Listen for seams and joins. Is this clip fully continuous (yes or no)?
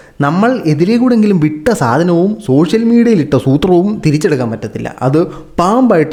yes